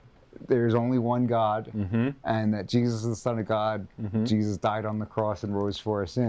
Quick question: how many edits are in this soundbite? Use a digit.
0